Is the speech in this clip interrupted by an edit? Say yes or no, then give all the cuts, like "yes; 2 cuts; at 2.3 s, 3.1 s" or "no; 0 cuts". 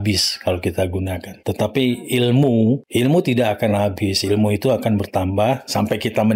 yes; 2 cuts; at 1.3 s, 2.9 s